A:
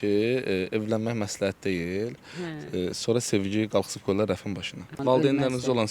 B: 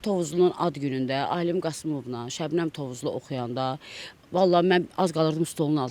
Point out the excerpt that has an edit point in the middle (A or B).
A